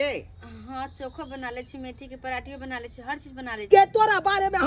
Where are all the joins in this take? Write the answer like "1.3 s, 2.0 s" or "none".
3.6 s